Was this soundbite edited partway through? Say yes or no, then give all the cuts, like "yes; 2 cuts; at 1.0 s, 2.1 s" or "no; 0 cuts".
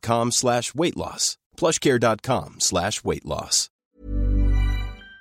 yes; 1 cut; at 3.6 s